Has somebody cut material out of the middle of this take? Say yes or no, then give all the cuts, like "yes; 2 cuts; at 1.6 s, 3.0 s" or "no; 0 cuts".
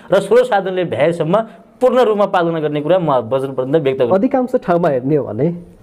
yes; 1 cut; at 4.1 s